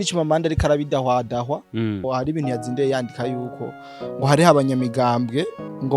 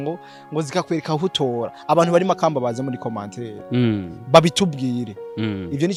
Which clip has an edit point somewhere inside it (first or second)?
first